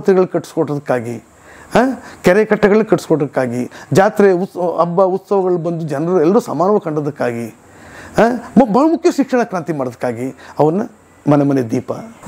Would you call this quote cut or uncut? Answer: uncut